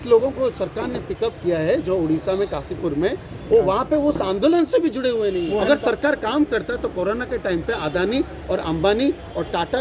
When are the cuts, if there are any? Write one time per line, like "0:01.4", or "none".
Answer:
0:05.6